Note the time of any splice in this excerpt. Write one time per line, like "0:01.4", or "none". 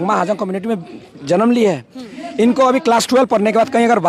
none